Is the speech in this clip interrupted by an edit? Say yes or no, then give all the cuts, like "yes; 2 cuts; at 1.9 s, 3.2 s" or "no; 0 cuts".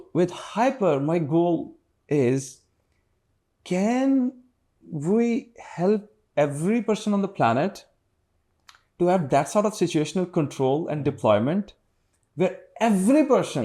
no; 0 cuts